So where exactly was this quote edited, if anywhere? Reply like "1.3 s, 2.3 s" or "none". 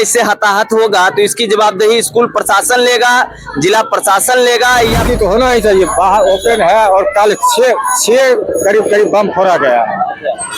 5.1 s